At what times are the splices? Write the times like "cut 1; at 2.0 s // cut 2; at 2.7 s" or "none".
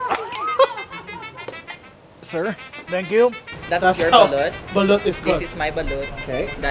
cut 1; at 3.5 s